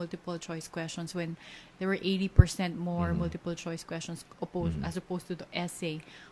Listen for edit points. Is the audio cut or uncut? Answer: uncut